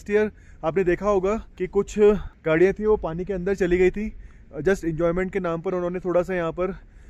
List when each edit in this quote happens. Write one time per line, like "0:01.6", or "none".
0:01.5
0:02.3

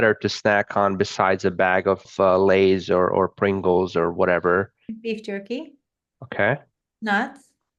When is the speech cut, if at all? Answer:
0:02.1

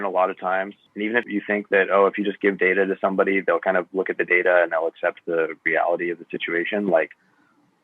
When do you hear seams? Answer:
0:01.2

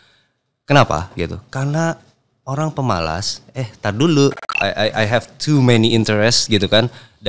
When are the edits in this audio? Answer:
0:04.5

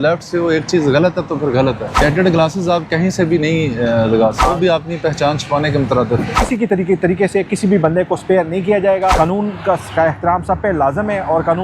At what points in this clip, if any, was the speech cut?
0:01.9
0:04.4
0:06.4
0:09.1

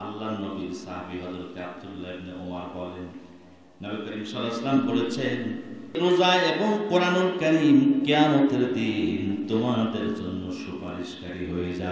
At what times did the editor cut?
0:06.0

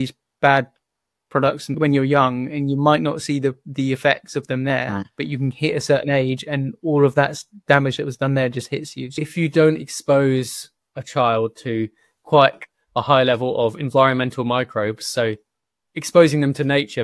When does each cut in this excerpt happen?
0:01.7
0:09.0

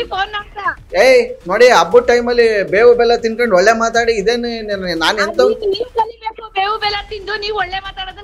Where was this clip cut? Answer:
none

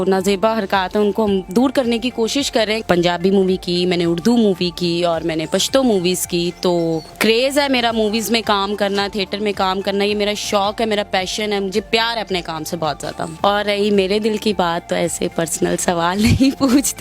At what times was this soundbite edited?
0:02.8
0:07.1
0:13.2

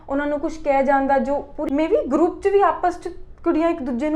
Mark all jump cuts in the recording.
0:01.5

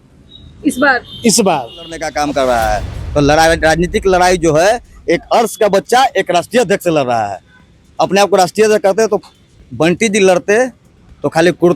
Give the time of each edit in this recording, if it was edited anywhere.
0:02.0

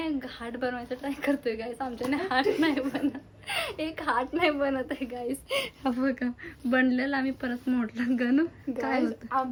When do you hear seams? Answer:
none

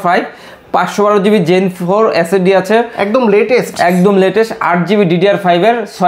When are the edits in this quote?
none

